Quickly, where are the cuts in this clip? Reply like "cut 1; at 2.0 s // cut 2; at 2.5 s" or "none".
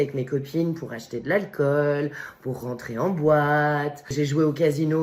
none